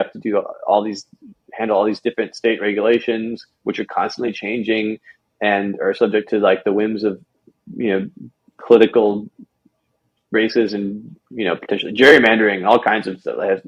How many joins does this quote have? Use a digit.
0